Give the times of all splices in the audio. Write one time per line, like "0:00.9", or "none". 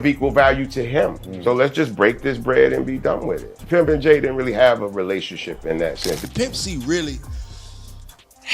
0:01.3
0:03.6
0:06.2